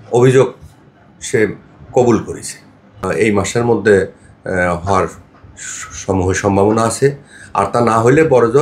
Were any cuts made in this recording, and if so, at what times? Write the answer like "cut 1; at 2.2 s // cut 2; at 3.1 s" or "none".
cut 1; at 3.0 s